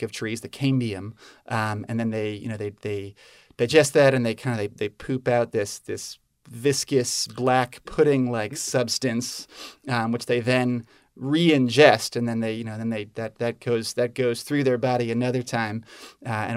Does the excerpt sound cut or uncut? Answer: uncut